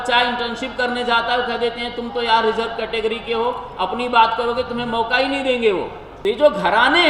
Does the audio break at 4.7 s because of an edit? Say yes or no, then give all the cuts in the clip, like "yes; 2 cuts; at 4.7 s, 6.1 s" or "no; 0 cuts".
no; 1 cut; at 6.0 s